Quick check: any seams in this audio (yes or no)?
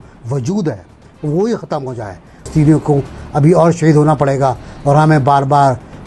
yes